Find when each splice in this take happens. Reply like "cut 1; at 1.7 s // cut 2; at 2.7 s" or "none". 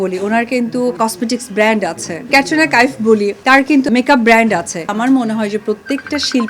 cut 1; at 1.0 s // cut 2; at 2.3 s // cut 3; at 3.7 s // cut 4; at 4.9 s